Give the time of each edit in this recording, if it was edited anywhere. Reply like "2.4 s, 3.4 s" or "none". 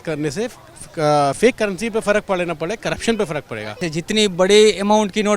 3.8 s